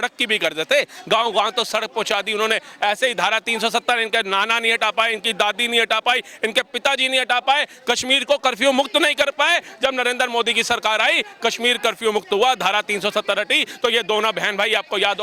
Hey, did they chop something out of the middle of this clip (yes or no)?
no